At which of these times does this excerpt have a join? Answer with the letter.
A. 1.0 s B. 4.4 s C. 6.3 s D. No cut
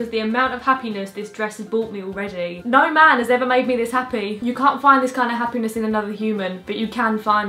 D